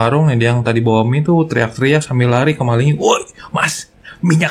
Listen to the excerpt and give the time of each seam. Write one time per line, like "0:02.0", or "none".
none